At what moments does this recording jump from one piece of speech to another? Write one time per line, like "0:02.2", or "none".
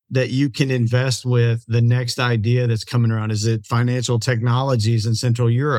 none